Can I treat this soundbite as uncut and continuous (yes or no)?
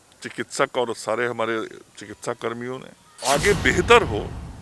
no